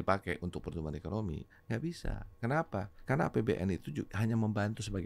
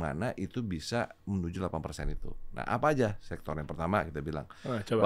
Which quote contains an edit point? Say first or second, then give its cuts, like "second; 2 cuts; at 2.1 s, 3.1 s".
first; 2 cuts; at 1.7 s, 2.9 s